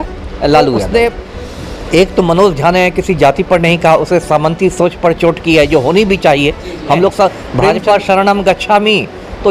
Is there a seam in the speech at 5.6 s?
no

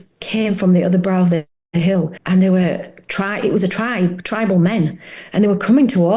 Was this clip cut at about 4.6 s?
no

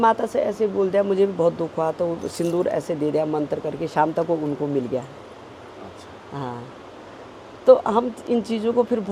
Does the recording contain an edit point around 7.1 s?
no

